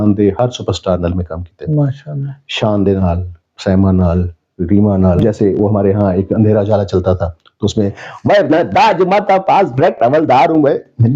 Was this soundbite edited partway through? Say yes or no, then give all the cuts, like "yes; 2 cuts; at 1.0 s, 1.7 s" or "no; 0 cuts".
yes; 1 cut; at 5.2 s